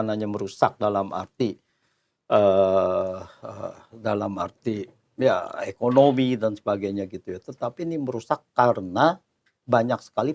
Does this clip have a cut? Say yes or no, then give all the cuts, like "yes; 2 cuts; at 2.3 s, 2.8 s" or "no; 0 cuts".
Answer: no; 0 cuts